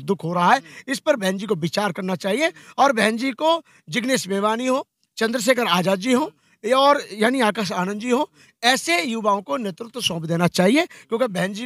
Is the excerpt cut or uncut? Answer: uncut